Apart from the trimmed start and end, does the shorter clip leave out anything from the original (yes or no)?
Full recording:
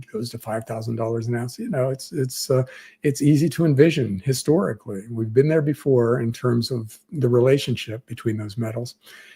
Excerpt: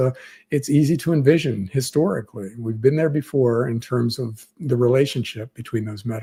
no